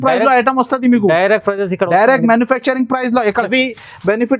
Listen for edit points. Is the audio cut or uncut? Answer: cut